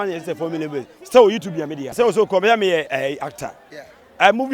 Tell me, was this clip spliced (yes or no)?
yes